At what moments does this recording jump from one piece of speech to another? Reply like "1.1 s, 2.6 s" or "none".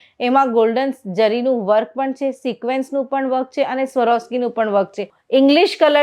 5.1 s